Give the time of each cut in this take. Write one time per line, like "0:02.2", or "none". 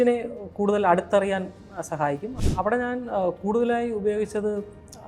0:02.4

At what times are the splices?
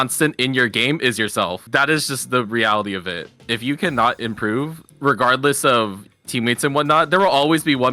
0:01.6
0:06.0

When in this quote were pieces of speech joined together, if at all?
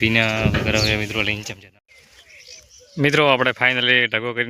0:01.4

